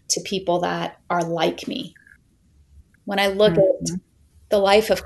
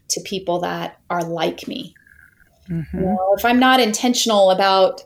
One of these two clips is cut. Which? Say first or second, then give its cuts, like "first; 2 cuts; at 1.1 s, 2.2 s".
first; 1 cut; at 2.7 s